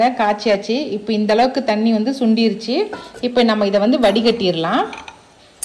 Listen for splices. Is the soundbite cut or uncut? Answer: uncut